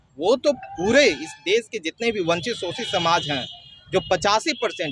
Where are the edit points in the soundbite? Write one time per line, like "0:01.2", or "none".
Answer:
none

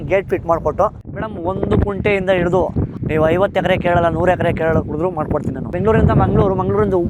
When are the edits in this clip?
0:01.0
0:02.9
0:05.7

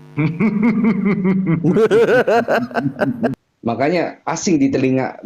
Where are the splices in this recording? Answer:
0:03.4

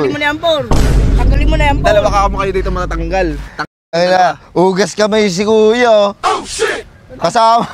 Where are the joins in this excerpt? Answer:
none

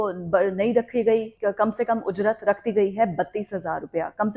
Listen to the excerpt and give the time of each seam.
0:01.3

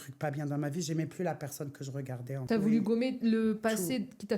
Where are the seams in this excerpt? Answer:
0:02.3

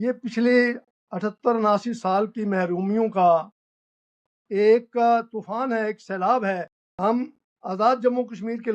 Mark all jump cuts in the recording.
0:06.8

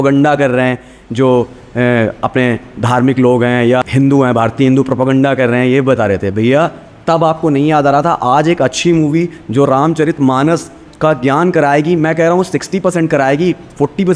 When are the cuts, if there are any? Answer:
0:03.8

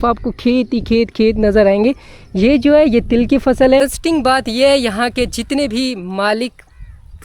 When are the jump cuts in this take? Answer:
0:03.8

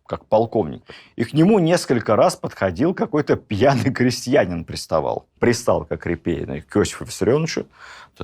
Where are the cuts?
0:05.3

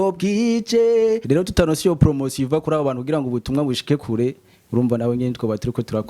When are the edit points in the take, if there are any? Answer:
0:01.2

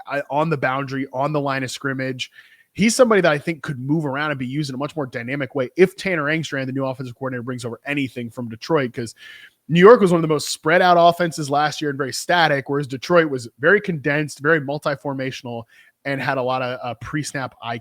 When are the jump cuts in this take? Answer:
none

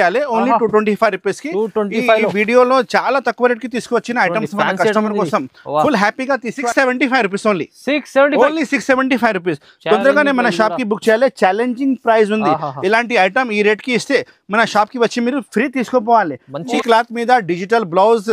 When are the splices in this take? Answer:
0:06.7
0:16.7

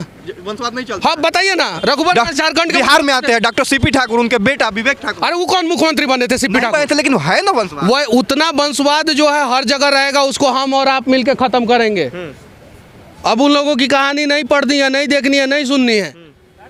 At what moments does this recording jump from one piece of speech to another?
none

